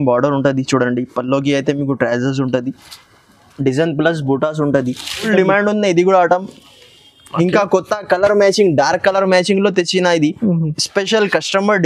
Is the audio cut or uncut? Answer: cut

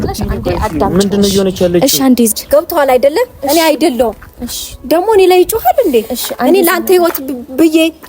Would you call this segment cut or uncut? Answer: cut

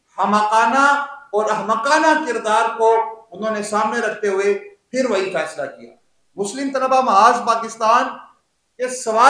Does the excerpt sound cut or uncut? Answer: uncut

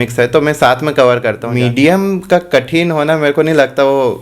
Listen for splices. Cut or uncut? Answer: cut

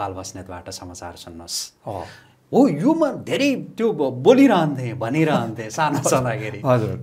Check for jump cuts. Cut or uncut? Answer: uncut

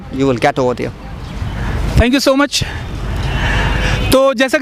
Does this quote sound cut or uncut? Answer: uncut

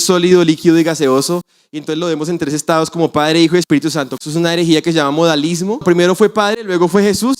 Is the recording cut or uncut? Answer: cut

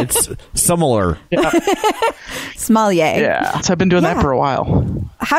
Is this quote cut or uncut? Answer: cut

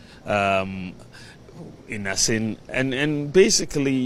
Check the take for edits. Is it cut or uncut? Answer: uncut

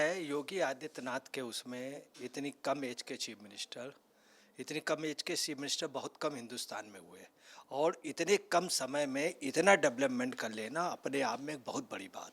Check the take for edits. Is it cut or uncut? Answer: uncut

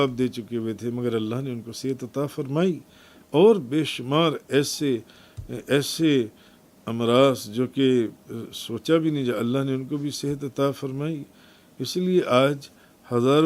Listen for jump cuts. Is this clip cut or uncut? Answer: uncut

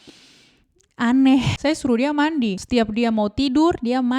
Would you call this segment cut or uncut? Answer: cut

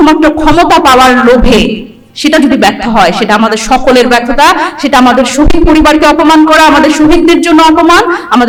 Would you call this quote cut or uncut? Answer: uncut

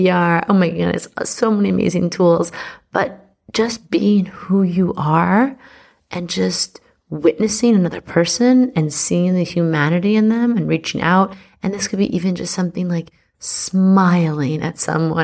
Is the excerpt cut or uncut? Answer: uncut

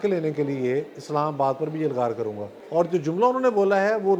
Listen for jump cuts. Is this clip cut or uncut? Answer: cut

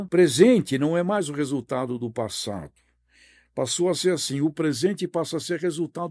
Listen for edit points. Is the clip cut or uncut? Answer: uncut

